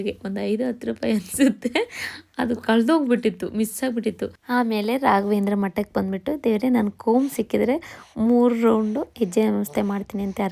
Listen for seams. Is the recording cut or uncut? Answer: cut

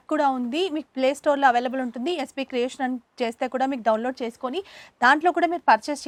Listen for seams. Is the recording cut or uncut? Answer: uncut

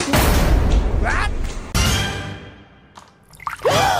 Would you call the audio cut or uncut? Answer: cut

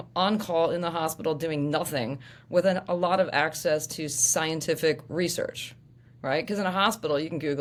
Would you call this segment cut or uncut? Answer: uncut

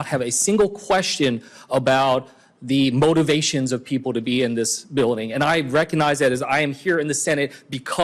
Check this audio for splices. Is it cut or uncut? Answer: uncut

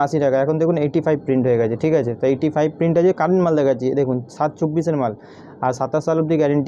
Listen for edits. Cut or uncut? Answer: uncut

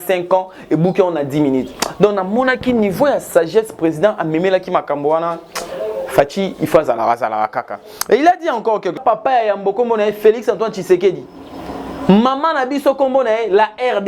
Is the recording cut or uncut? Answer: cut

